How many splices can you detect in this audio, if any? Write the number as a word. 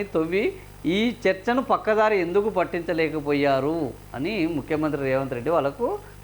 zero